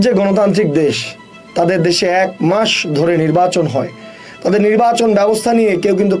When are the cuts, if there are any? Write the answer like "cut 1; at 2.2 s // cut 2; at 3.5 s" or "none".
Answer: none